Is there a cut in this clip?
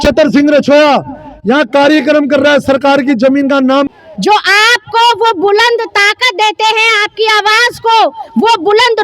yes; 1 cut; at 3.9 s

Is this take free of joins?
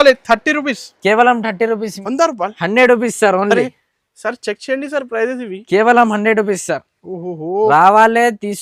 no; 1 cut; at 2.0 s

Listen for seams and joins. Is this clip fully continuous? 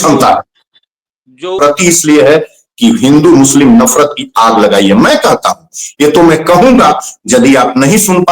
no; 1 cut; at 1.6 s

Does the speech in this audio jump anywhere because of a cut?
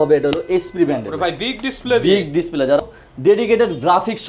yes; 1 cut; at 2.8 s

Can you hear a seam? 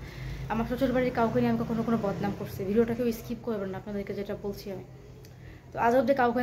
no; 0 cuts

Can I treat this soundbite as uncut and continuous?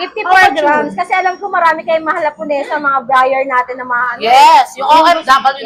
yes; 0 cuts

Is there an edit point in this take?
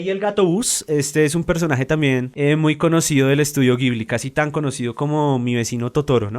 yes; 1 cut; at 2.3 s

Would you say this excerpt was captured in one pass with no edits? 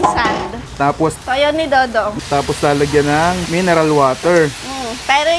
no; 3 cuts; at 1.2 s, 2.1 s, 3.4 s

